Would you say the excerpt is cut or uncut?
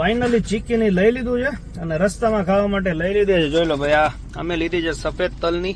uncut